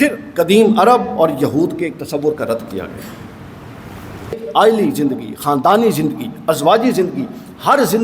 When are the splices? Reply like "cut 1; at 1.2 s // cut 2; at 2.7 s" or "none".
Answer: cut 1; at 4.4 s